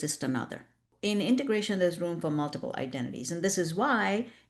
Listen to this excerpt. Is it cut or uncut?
cut